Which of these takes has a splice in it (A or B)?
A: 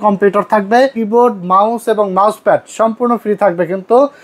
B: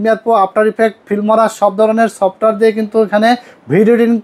A